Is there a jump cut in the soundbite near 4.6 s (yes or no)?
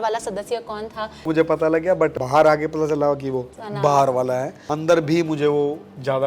yes